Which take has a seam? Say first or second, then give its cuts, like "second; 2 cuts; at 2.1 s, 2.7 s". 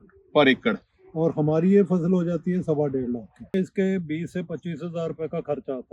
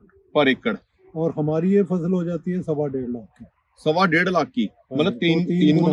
first; 1 cut; at 3.5 s